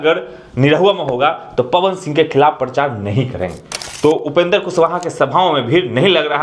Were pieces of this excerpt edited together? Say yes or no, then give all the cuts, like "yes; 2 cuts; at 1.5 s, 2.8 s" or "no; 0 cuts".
yes; 1 cut; at 3.6 s